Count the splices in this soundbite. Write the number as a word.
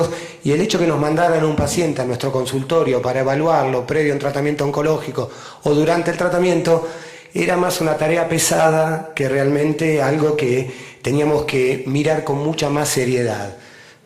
one